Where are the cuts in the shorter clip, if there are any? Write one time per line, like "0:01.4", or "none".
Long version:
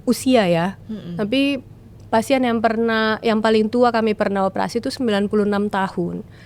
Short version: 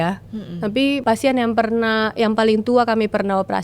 0:01.0

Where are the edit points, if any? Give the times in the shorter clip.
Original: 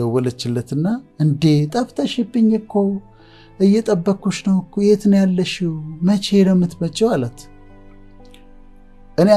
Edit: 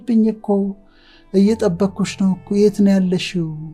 none

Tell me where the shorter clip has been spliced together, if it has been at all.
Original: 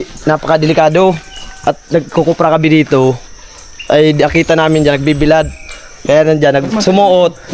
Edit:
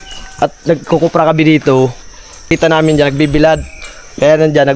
0:02.5

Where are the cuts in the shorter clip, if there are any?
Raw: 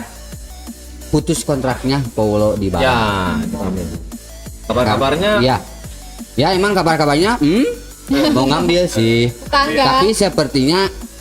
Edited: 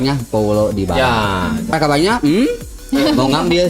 0:01.7

